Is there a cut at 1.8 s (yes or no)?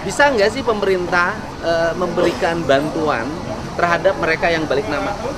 no